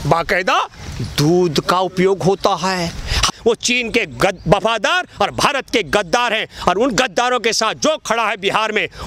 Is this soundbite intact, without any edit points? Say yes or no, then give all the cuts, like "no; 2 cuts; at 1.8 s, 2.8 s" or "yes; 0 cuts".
no; 1 cut; at 3.2 s